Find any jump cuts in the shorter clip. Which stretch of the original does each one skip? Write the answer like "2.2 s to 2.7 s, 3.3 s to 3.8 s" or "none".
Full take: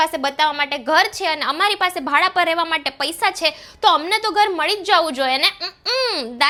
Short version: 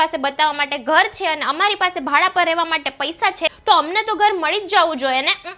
3.5 s to 3.7 s

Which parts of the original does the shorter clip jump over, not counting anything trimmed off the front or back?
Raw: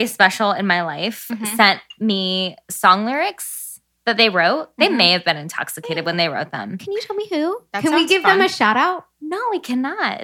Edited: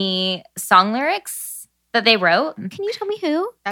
4.7 s to 6.7 s

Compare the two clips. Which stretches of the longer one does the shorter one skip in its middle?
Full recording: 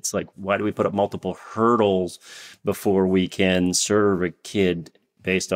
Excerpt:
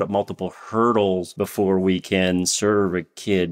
2.1 s to 2.6 s

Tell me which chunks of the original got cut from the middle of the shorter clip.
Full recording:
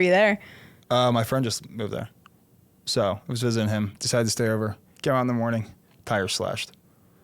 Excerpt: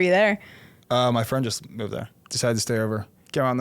2.3 s to 4.0 s

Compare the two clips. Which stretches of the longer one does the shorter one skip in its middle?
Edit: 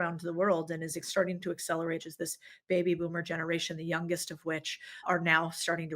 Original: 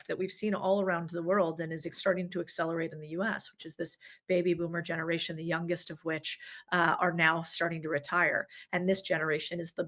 3.0 s to 3.7 s, 6.6 s to 7.0 s

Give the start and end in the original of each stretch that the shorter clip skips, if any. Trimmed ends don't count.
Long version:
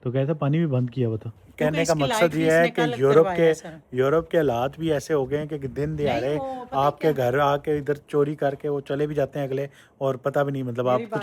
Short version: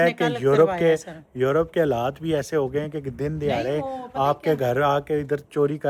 none

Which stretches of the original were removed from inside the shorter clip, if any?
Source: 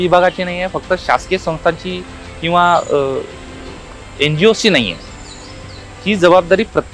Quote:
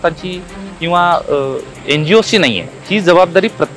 3.3 s to 4.0 s, 5.0 s to 5.9 s

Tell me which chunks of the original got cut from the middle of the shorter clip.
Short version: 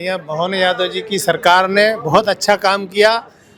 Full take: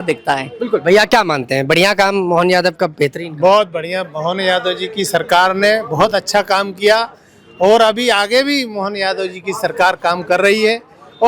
none

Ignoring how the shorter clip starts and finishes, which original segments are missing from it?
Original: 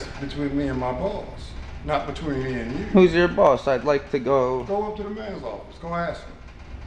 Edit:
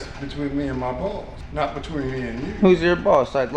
1.4 s to 1.7 s

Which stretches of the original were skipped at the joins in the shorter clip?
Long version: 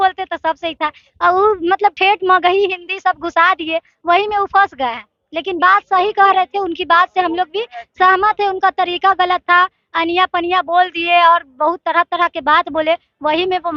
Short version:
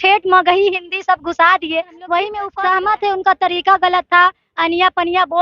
4.4 s to 7.8 s

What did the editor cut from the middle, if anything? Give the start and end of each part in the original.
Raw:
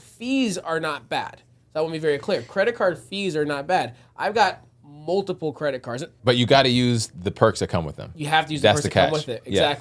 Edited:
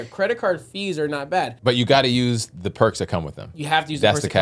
3.9 s to 6.2 s

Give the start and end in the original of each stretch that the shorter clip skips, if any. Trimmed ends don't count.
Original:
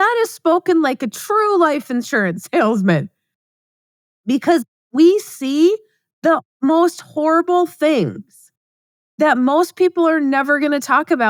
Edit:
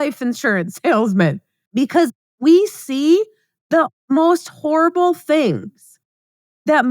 3.2 s to 4.1 s

